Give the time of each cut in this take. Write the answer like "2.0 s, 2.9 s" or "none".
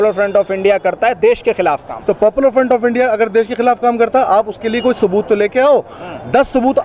none

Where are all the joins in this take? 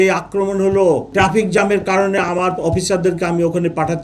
1.1 s

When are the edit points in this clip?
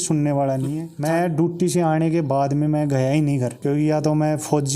0.9 s, 3.6 s

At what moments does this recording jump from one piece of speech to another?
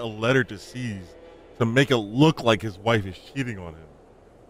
none

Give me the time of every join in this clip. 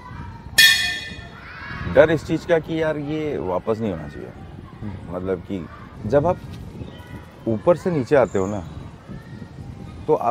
5.8 s

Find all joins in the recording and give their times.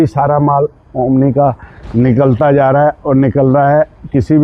none

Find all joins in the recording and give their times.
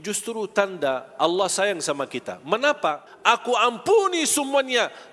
3.1 s

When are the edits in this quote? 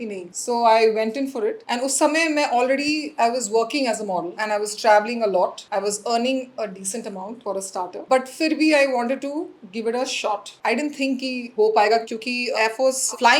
none

